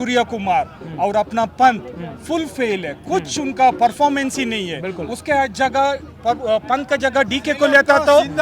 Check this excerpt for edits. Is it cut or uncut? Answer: uncut